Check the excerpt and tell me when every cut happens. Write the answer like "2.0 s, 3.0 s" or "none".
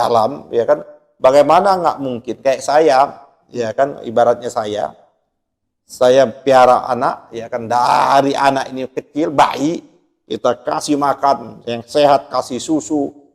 none